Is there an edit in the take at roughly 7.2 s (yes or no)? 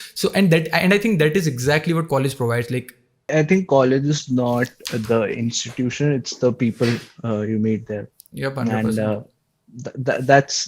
no